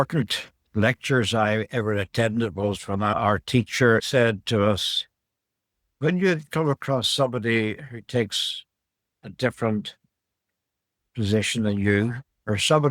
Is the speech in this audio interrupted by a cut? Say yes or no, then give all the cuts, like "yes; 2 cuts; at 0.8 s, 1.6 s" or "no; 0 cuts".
yes; 2 cuts; at 3.1 s, 4.1 s